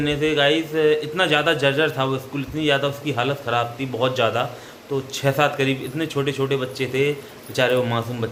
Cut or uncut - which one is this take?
uncut